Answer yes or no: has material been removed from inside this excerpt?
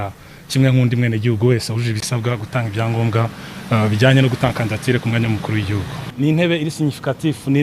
yes